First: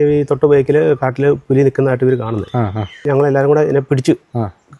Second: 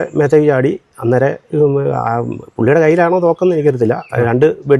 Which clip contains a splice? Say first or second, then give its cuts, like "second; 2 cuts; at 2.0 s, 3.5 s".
first; 1 cut; at 3.0 s